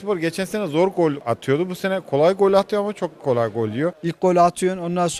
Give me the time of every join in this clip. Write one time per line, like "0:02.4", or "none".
0:01.2
0:04.0